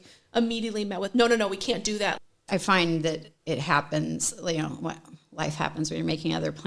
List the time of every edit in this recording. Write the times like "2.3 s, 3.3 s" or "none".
2.3 s